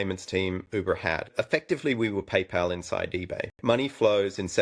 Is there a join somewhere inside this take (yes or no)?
yes